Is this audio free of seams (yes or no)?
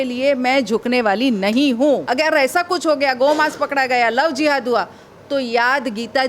no